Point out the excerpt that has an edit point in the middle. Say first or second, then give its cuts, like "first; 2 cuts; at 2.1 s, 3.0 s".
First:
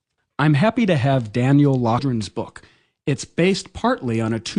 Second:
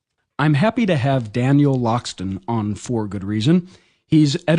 second; 1 cut; at 2.0 s